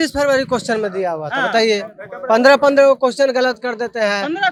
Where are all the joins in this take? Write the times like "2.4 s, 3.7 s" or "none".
none